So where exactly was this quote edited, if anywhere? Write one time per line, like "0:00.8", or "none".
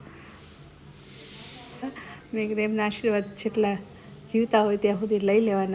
0:01.8

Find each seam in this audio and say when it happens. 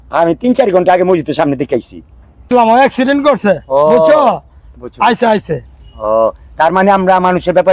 0:02.5

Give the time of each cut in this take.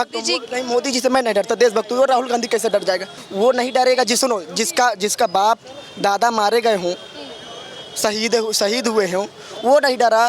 none

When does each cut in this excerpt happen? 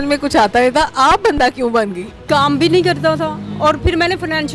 0:02.2

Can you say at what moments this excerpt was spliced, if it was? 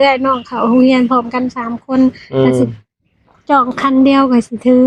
none

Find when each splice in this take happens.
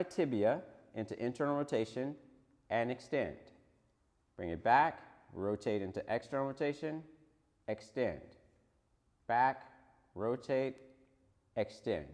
none

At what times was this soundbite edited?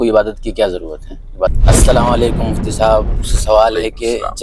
0:01.5

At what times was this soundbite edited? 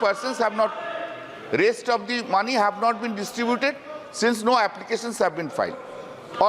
none

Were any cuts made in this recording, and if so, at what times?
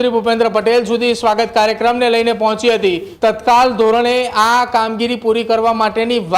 0:03.1

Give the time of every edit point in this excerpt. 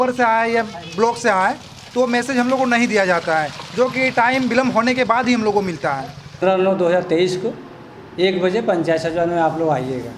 0:06.4

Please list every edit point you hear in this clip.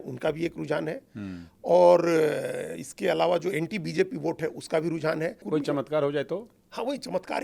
0:05.4

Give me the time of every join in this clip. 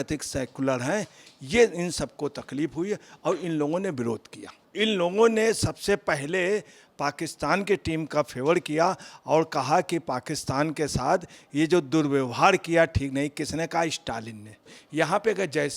0:04.6
0:14.8

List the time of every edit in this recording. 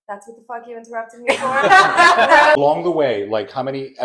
0:02.6

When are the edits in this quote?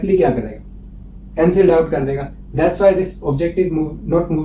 none

